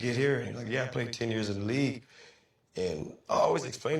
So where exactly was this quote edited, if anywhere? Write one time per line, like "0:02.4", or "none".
0:01.7